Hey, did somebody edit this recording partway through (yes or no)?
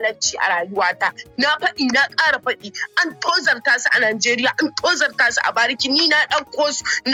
no